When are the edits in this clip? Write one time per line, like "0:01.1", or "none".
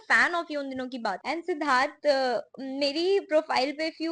0:01.2